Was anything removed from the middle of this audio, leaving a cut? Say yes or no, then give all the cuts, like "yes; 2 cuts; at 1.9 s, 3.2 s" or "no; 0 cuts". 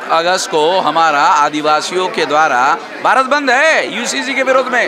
no; 0 cuts